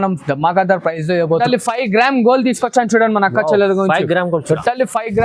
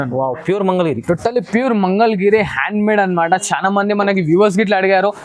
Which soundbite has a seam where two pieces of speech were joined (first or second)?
first